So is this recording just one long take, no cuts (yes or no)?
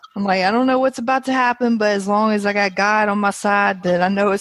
yes